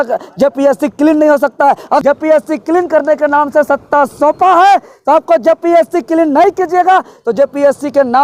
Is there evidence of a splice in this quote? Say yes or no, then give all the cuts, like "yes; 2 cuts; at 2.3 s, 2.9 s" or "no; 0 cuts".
yes; 1 cut; at 2.0 s